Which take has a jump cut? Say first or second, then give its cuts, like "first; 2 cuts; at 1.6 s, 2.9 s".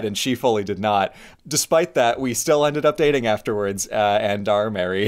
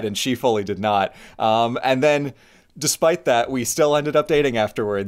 first; 1 cut; at 1.2 s